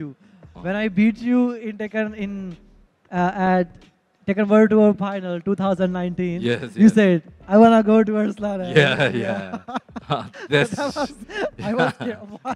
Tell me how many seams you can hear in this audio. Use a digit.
0